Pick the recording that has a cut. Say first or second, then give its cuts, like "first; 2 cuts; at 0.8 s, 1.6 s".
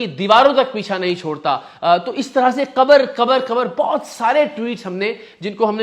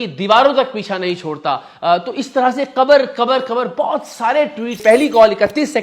second; 1 cut; at 4.8 s